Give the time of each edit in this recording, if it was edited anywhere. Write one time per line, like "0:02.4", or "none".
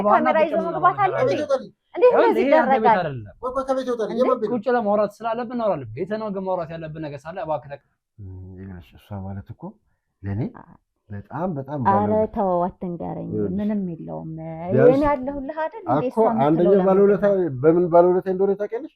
0:07.8